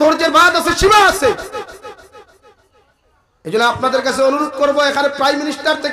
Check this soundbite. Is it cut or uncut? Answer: uncut